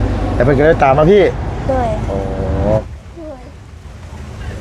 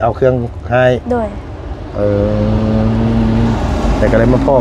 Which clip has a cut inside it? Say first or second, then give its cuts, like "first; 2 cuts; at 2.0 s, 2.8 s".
first; 1 cut; at 2.8 s